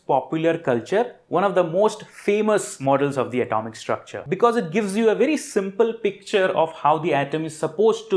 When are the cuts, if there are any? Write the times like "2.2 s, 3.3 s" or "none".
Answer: 2.7 s, 4.2 s

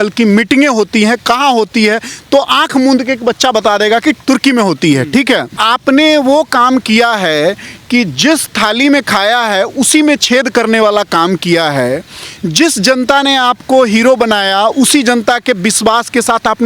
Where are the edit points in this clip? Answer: 5.6 s

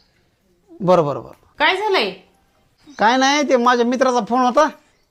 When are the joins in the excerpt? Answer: none

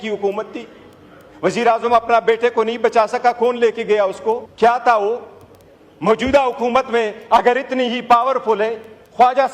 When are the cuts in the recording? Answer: 4.5 s

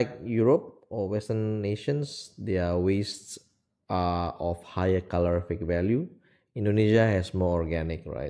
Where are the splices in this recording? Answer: none

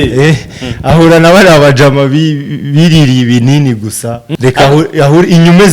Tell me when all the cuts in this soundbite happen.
4.3 s

